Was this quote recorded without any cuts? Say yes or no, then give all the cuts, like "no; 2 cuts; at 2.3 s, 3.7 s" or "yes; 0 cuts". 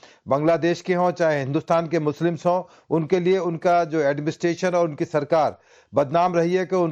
yes; 0 cuts